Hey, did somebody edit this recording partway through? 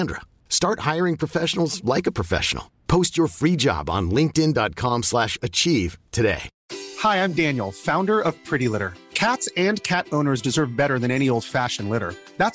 yes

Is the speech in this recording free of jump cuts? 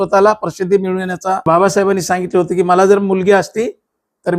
no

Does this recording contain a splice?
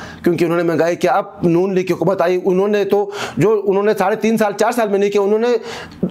no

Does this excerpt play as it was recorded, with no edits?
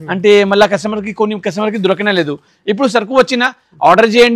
yes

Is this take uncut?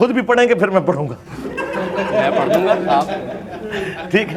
yes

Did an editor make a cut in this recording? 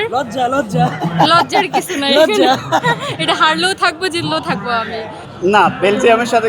yes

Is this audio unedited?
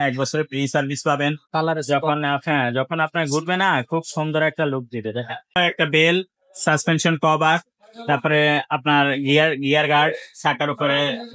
no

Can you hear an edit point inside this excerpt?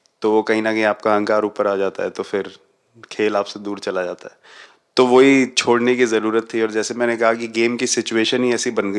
no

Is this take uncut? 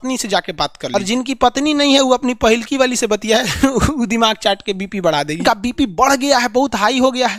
no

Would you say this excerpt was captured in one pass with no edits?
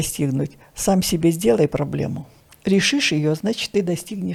yes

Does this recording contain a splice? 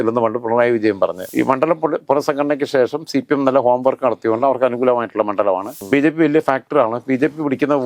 yes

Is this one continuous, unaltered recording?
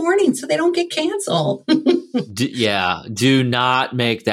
no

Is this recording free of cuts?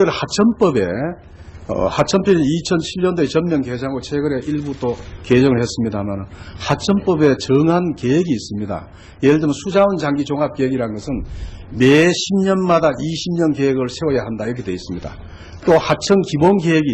yes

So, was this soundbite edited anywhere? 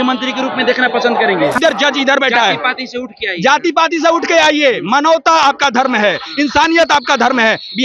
yes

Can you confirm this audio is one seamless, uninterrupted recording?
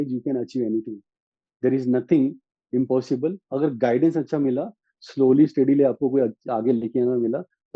yes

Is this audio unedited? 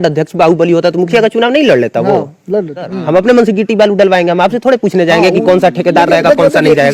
no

